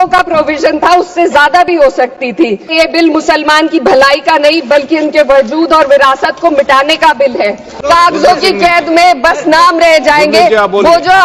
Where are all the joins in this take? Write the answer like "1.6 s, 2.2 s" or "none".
2.7 s, 7.8 s